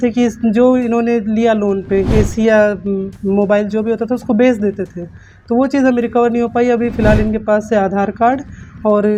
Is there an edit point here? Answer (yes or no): no